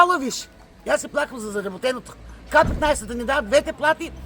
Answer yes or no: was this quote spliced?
no